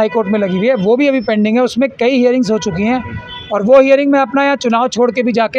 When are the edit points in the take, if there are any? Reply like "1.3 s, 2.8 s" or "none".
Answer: none